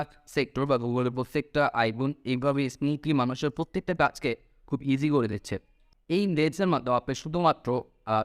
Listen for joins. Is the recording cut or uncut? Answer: cut